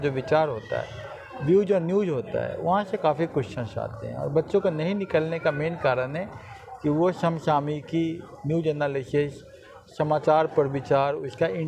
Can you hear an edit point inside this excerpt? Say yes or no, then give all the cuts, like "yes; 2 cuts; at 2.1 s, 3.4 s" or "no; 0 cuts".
no; 0 cuts